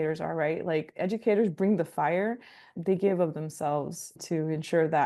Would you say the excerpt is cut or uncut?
cut